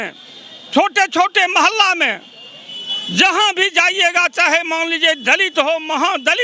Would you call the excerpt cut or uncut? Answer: uncut